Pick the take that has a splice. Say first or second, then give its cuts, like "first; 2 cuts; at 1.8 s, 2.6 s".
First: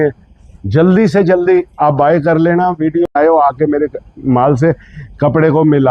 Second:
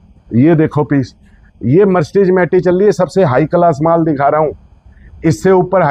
first; 1 cut; at 3.1 s